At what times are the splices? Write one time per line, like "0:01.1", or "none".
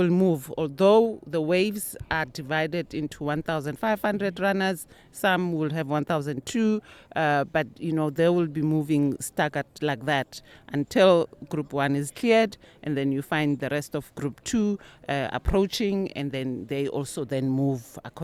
none